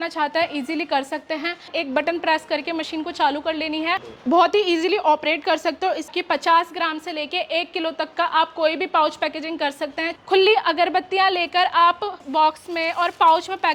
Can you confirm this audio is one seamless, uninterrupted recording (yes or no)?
no